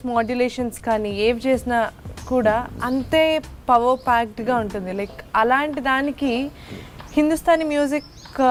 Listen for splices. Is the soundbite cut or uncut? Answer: uncut